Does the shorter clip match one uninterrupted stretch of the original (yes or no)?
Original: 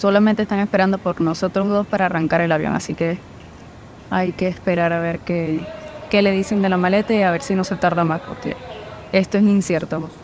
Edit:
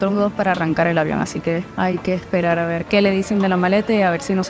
no